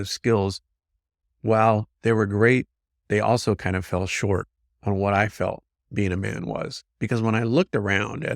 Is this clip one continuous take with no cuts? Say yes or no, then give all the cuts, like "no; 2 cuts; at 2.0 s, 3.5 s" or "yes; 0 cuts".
yes; 0 cuts